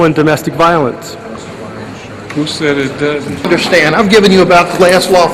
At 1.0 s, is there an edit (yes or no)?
no